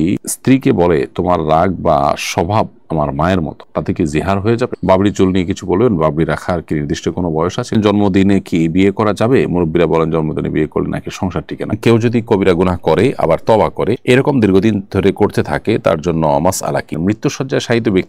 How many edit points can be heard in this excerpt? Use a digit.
4